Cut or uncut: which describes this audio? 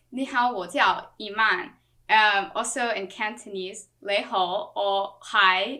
uncut